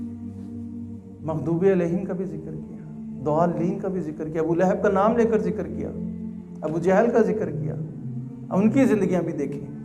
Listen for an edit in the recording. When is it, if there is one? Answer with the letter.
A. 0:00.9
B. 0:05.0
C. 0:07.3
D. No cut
A